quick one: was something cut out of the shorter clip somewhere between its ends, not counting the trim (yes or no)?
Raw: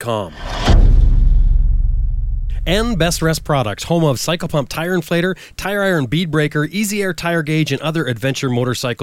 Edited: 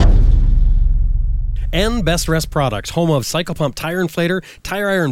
yes